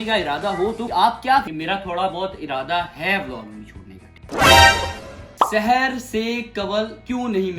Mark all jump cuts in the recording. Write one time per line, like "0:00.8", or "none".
0:01.5
0:05.3